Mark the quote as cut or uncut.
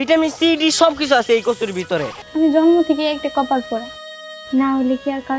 cut